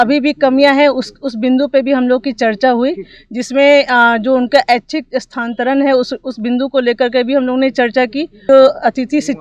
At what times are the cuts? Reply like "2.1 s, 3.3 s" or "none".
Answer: 8.4 s